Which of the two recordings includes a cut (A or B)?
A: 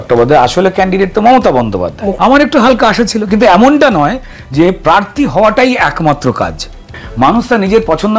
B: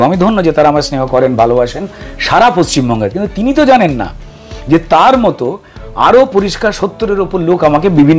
A